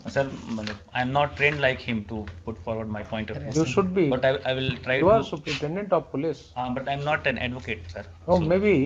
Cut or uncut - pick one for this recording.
uncut